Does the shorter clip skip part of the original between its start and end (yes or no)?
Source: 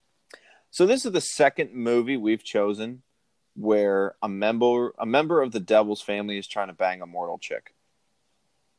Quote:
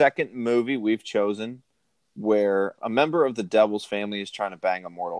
yes